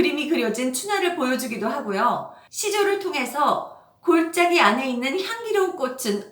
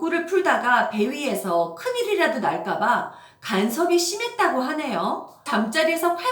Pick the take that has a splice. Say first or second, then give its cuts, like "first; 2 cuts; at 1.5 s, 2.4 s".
second; 1 cut; at 5.4 s